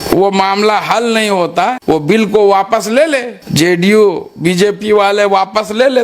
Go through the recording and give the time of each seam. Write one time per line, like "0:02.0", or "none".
0:01.8
0:03.4